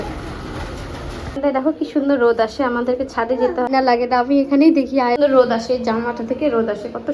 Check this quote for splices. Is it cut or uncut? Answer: cut